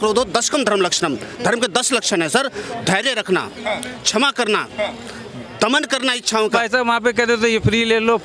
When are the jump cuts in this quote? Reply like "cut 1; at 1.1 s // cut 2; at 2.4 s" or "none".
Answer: cut 1; at 6.5 s